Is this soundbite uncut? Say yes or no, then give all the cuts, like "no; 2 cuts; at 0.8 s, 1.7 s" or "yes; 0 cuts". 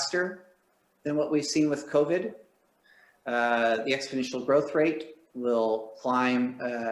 yes; 0 cuts